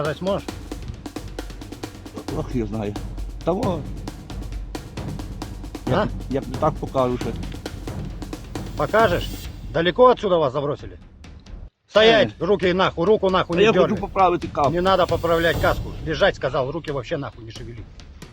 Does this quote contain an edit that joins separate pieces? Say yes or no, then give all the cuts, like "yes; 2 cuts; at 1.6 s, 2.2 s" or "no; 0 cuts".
yes; 1 cut; at 17.3 s